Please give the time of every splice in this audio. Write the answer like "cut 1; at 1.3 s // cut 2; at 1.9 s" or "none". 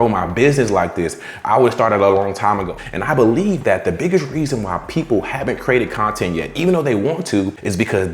cut 1; at 2.8 s